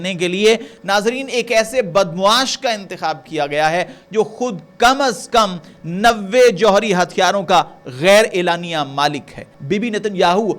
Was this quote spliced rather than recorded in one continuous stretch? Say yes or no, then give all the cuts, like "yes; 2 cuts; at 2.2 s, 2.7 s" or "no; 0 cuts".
yes; 1 cut; at 9.5 s